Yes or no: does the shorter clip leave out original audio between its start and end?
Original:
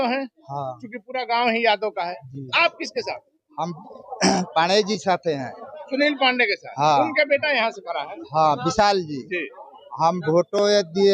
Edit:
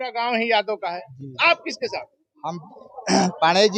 no